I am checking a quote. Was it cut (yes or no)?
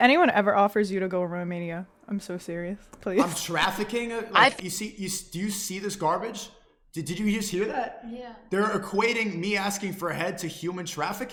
no